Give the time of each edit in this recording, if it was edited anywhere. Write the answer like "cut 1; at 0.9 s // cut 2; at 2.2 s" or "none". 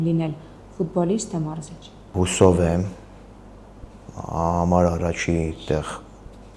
cut 1; at 2.1 s